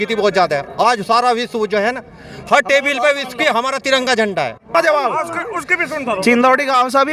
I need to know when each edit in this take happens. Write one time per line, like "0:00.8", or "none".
0:04.7